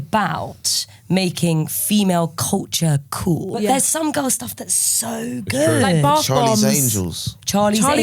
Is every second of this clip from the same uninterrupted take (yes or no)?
no